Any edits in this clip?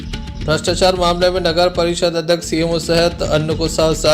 no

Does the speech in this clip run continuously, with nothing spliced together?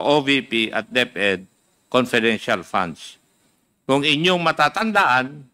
yes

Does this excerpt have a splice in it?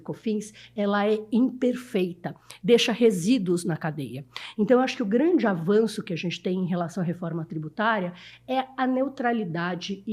no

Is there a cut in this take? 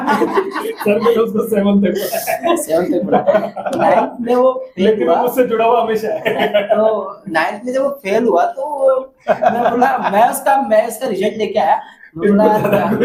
no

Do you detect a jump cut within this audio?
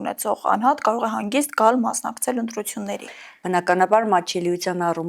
no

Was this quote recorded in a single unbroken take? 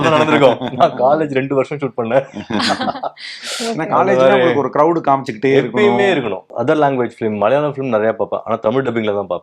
no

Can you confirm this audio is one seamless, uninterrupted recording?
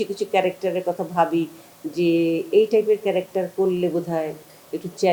yes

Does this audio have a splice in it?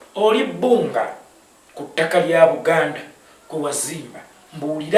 no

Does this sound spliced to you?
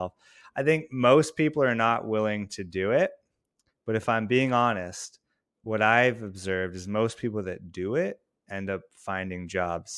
no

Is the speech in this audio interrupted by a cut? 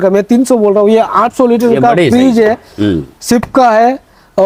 no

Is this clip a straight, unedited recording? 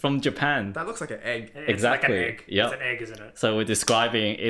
yes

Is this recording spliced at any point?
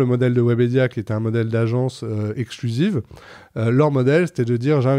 no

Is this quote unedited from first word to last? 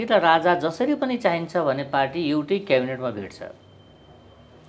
yes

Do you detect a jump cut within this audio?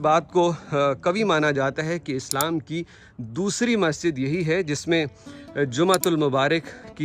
no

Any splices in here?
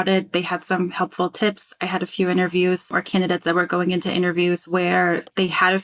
yes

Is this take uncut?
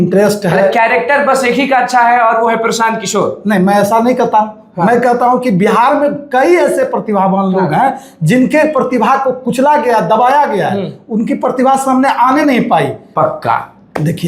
no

